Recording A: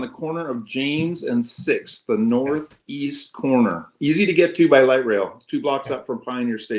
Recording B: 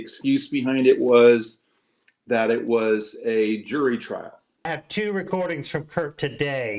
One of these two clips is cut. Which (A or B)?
B